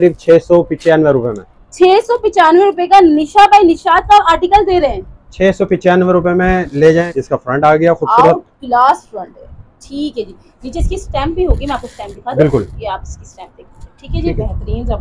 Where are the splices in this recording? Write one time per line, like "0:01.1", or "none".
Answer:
0:07.1